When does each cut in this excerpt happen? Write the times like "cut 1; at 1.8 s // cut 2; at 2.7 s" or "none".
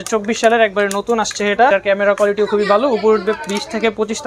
cut 1; at 1.7 s

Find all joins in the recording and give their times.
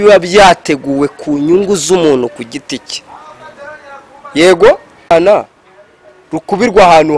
cut 1; at 5.1 s

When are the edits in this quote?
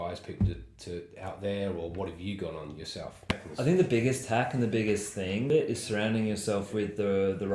cut 1; at 3.4 s // cut 2; at 5.5 s

